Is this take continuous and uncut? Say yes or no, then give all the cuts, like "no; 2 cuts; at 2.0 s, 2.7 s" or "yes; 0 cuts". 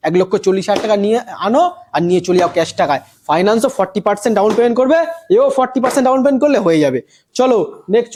yes; 0 cuts